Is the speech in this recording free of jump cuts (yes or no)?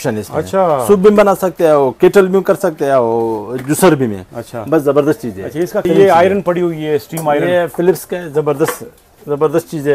no